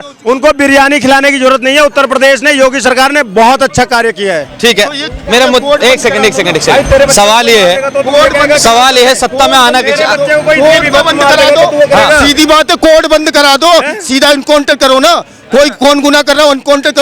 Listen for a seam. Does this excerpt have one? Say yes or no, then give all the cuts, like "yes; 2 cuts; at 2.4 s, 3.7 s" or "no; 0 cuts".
no; 0 cuts